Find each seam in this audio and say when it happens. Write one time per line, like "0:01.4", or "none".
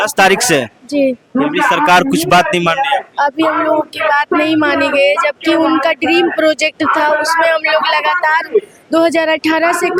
none